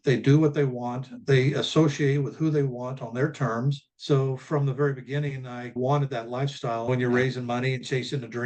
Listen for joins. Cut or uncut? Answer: cut